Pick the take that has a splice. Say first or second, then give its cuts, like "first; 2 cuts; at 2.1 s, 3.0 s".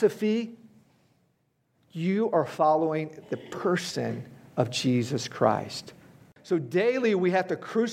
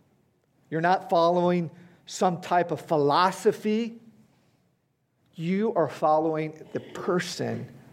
first; 1 cut; at 6.3 s